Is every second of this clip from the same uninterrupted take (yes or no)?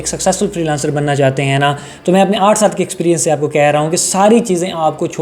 yes